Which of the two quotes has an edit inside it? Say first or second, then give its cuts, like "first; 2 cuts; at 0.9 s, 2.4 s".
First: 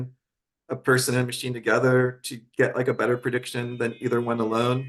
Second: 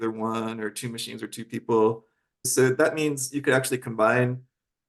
second; 1 cut; at 2.5 s